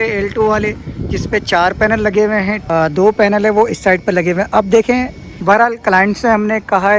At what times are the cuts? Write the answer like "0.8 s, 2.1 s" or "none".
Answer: 2.6 s, 5.2 s